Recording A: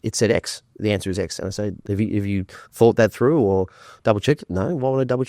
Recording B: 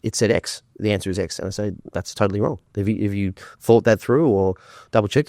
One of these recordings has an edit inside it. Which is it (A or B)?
A